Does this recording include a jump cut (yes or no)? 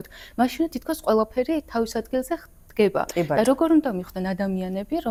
no